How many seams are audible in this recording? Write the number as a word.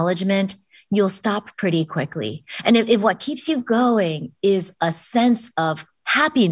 zero